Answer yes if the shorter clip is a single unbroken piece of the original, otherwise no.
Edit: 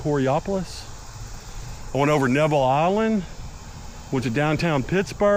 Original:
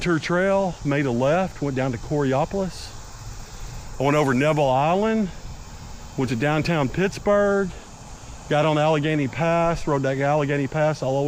yes